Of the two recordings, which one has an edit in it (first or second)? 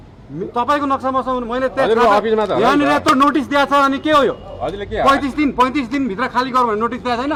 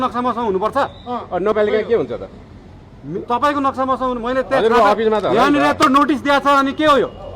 second